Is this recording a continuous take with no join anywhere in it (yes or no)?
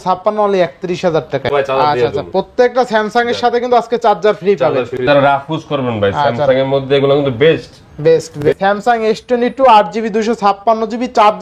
no